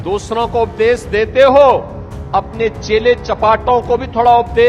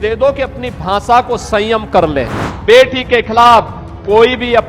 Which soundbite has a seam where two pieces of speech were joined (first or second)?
second